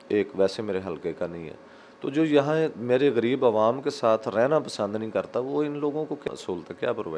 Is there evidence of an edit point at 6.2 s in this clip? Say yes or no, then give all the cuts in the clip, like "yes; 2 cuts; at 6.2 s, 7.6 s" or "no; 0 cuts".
yes; 1 cut; at 6.2 s